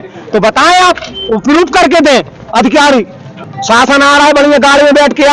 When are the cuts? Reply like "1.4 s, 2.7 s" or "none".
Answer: 3.4 s